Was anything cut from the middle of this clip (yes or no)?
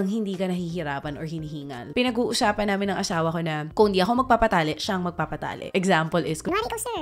yes